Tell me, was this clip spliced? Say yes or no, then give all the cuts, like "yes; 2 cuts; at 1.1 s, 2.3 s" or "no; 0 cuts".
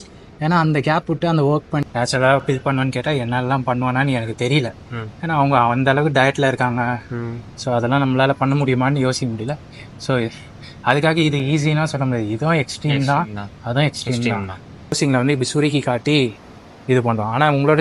yes; 2 cuts; at 1.8 s, 15.0 s